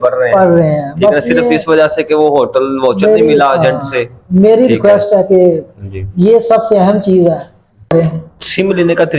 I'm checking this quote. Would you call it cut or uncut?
cut